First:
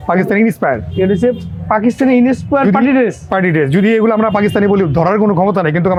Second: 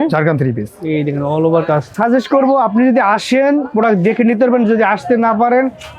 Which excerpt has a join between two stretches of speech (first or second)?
second